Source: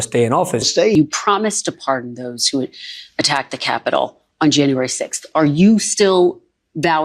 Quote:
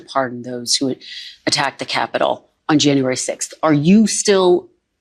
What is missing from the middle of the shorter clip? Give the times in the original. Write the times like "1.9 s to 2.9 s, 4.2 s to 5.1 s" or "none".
none